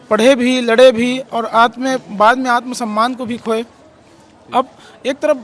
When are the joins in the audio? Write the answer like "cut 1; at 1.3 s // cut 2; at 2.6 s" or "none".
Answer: none